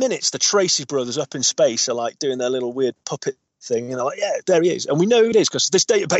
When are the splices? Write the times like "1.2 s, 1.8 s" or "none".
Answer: 3.5 s